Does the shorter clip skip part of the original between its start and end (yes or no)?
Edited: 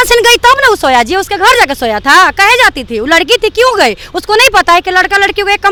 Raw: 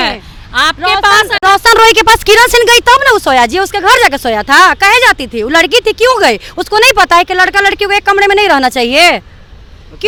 no